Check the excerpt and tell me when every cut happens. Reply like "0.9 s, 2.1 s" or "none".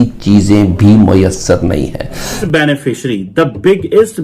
2.4 s